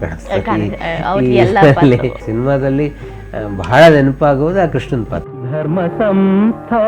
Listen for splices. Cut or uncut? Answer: cut